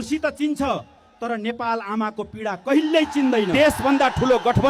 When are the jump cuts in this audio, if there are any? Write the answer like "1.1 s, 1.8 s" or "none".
3.5 s